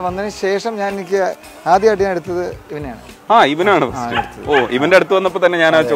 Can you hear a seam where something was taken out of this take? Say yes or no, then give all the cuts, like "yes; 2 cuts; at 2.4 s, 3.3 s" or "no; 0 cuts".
no; 0 cuts